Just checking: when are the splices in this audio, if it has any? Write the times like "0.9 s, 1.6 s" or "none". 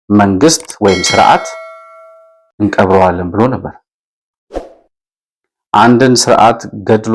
none